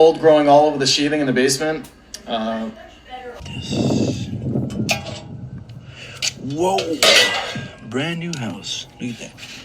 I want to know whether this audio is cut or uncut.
cut